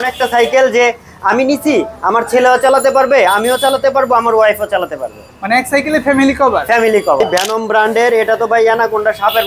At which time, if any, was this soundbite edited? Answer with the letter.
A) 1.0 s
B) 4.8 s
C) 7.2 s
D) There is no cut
C